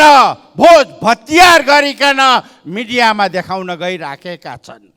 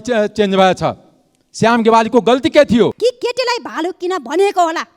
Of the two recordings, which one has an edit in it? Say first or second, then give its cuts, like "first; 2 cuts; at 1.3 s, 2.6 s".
second; 1 cut; at 2.9 s